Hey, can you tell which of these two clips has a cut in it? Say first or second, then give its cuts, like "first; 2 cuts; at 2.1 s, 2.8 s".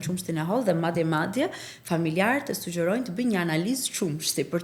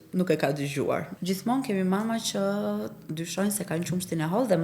second; 1 cut; at 1.1 s